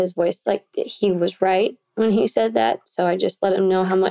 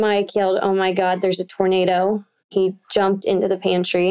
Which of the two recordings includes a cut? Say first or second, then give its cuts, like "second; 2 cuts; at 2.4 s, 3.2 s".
second; 1 cut; at 2.5 s